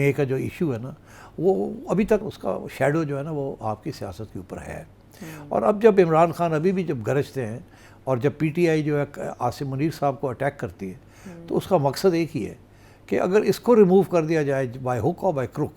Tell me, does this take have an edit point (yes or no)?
no